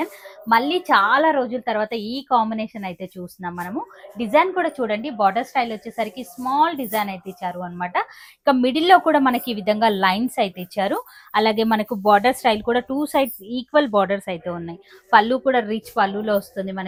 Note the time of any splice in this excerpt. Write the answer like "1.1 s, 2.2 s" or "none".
none